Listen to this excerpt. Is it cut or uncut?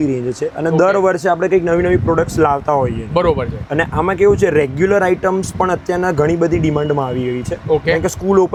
uncut